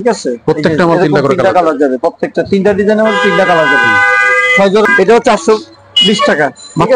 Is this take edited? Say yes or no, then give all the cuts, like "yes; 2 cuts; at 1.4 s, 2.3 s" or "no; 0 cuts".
yes; 1 cut; at 4.9 s